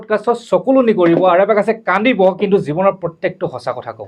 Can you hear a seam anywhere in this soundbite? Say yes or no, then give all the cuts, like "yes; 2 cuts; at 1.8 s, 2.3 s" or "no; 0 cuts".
no; 0 cuts